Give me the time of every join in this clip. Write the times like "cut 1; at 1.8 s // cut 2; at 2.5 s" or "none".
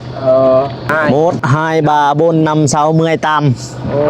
cut 1; at 0.9 s